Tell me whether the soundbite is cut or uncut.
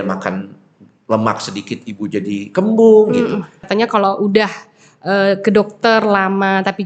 cut